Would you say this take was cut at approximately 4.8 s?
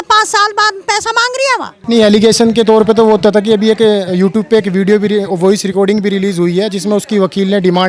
no; 1 cut; at 1.7 s

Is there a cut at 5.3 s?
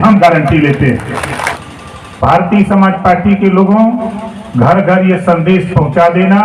no; 1 cut; at 1.6 s

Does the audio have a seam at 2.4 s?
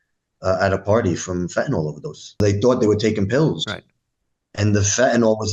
yes; 1 cut; at 2.4 s

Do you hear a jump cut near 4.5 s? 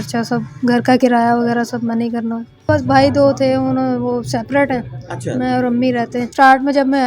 no; 2 cuts; at 2.7 s, 6.3 s

